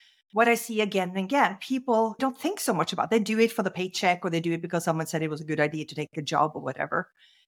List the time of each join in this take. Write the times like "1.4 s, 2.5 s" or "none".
2.2 s